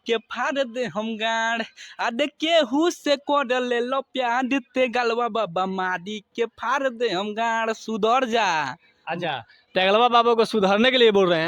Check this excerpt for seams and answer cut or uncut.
uncut